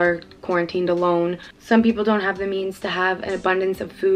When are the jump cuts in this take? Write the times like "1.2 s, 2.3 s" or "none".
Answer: none